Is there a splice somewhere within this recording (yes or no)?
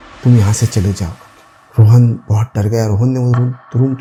no